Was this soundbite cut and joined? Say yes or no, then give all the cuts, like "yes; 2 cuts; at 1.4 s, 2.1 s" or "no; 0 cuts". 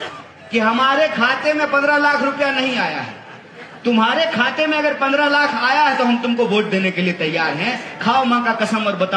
no; 0 cuts